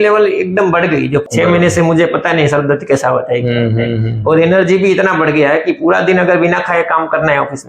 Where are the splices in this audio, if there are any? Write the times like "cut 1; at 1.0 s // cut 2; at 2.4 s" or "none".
cut 1; at 1.2 s

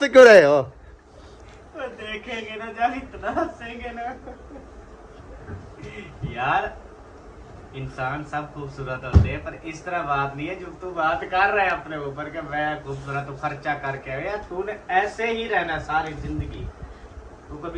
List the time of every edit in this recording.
none

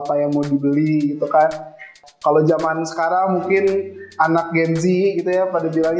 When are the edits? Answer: cut 1; at 1.9 s

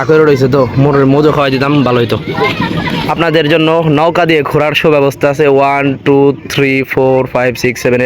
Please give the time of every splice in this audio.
cut 1; at 2.9 s

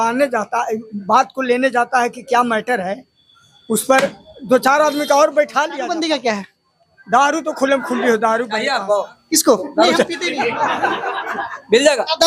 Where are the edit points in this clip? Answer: cut 1; at 5.9 s // cut 2; at 8.6 s

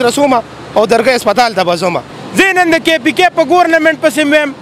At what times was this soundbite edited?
cut 1; at 2.1 s

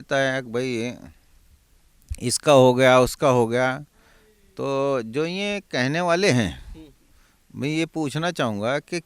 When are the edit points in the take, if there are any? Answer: none

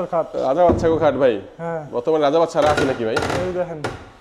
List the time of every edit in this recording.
none

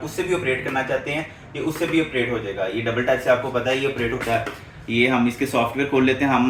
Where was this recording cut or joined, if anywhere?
none

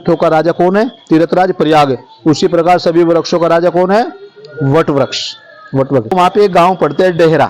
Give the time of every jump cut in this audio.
cut 1; at 6.1 s

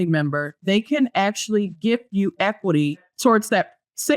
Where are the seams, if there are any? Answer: cut 1; at 3.1 s

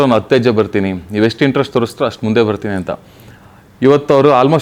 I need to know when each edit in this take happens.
none

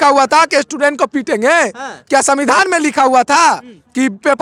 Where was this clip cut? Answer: none

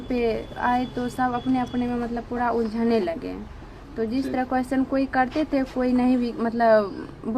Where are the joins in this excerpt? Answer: none

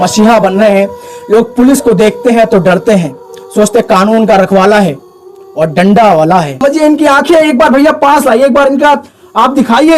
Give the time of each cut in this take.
cut 1; at 6.6 s

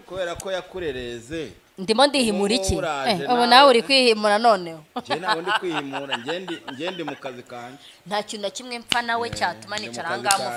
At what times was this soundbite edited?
none

